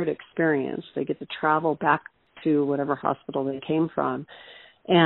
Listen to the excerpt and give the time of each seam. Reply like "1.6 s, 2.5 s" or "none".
2.2 s

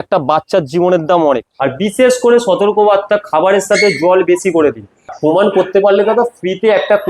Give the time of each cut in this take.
1.5 s, 5.1 s

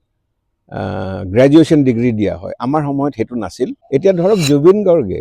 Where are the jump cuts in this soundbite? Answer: 3.8 s

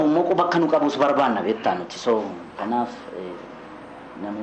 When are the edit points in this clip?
none

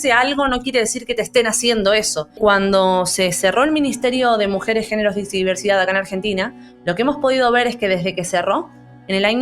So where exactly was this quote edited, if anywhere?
2.4 s

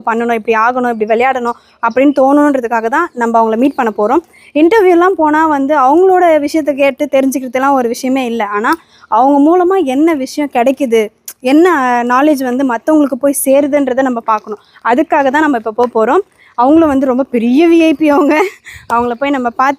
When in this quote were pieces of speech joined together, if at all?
none

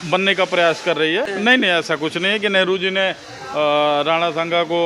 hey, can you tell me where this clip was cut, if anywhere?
1.3 s

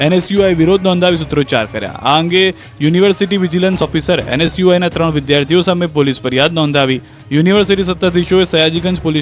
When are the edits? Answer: 4.9 s

